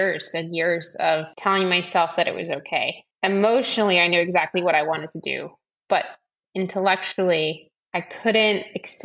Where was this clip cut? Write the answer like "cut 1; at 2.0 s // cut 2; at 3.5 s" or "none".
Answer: cut 1; at 1.3 s // cut 2; at 3.0 s // cut 3; at 7.7 s